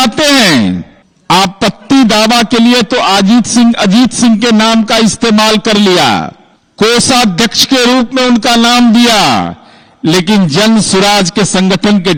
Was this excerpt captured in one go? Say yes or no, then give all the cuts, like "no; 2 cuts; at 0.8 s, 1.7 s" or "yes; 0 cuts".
yes; 0 cuts